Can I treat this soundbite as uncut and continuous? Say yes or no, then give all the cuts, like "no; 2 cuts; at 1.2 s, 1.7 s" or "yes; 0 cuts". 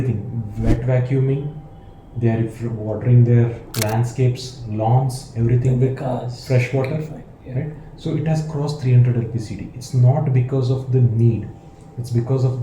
yes; 0 cuts